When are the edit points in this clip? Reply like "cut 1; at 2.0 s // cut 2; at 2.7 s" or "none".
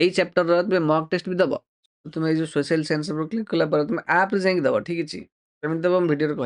cut 1; at 1.7 s